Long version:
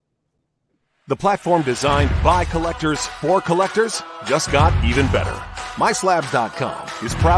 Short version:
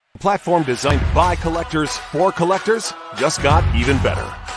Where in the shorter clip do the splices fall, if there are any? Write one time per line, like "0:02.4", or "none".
0:00.9